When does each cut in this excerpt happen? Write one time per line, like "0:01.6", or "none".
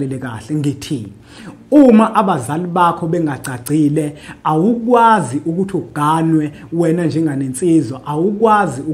none

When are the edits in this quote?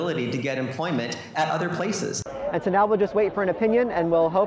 0:02.3

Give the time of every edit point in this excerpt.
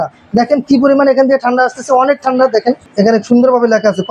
0:02.8

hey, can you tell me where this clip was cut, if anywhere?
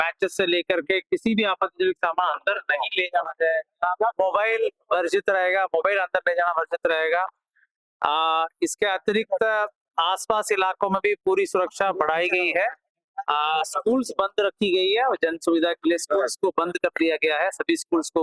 none

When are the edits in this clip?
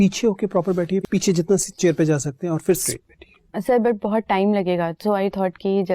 0:01.0
0:02.9

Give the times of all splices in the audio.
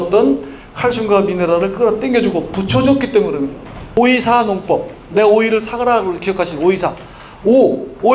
0:04.0

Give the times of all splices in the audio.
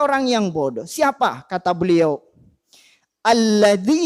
none

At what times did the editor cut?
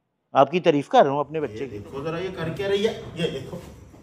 0:01.4

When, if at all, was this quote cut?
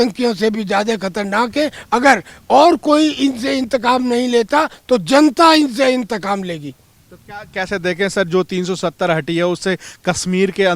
none

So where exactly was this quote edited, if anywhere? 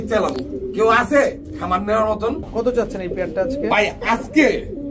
0:02.5

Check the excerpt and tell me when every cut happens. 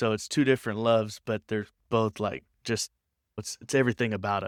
none

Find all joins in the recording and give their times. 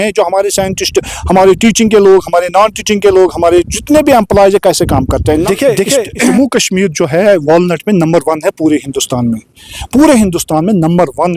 0:05.2
0:06.3

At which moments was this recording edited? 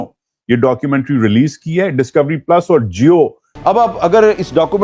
0:03.5

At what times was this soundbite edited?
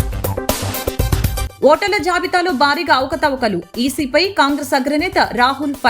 0:01.5

